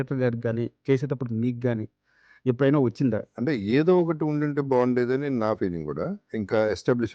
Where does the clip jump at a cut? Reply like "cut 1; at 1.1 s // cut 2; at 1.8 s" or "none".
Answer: cut 1; at 3.2 s // cut 2; at 6.3 s